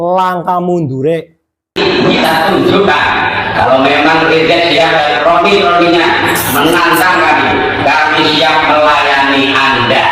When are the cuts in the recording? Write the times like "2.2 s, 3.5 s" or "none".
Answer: 1.8 s